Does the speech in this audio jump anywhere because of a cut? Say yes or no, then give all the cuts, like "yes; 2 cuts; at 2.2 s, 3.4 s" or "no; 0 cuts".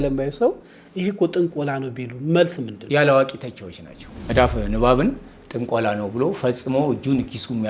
yes; 2 cuts; at 2.7 s, 4.2 s